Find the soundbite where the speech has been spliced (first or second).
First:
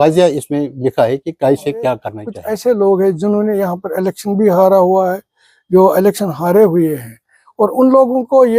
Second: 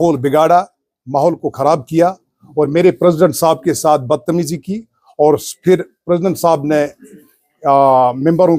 first